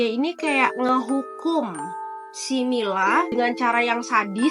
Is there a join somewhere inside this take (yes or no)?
yes